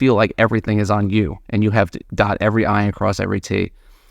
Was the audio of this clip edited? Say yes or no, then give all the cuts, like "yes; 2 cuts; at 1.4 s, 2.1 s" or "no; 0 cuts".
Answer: yes; 1 cut; at 2.0 s